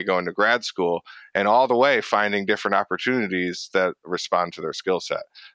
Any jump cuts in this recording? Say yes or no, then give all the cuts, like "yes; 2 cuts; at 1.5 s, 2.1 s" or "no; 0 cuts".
no; 0 cuts